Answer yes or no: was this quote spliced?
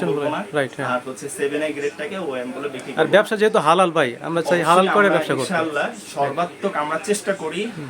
no